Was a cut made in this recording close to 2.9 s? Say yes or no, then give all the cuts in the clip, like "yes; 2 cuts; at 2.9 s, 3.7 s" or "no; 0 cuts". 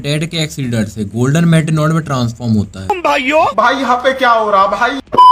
yes; 1 cut; at 2.9 s